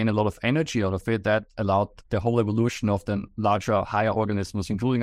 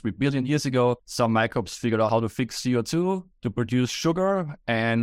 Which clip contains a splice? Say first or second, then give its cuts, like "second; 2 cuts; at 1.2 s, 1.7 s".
second; 3 cuts; at 1.1 s, 2.1 s, 3.4 s